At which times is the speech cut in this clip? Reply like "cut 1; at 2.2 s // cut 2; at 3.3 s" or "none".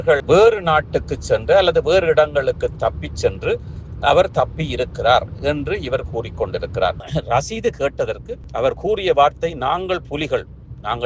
cut 1; at 7.0 s